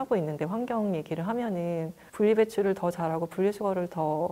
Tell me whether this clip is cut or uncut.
cut